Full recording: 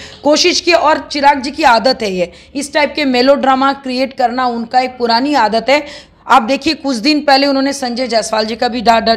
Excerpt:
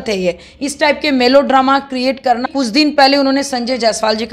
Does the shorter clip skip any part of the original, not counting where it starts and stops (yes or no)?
yes